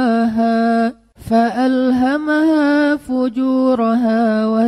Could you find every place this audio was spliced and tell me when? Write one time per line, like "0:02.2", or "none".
0:01.1